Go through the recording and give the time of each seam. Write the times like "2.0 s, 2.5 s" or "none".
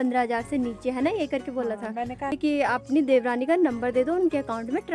2.3 s